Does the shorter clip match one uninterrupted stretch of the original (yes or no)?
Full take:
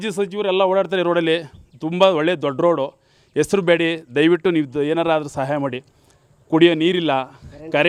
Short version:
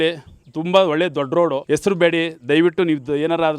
no